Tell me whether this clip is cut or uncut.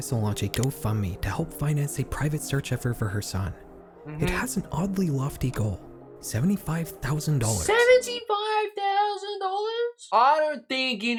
uncut